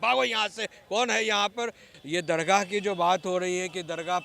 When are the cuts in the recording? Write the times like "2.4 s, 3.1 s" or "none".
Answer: 1.9 s